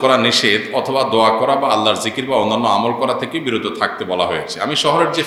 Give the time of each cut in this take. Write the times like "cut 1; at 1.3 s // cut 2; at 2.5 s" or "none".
none